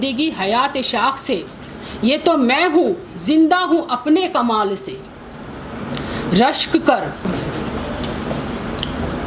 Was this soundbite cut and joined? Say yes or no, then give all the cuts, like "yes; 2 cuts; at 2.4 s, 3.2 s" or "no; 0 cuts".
yes; 1 cut; at 7.2 s